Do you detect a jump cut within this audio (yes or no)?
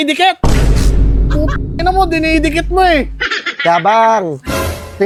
no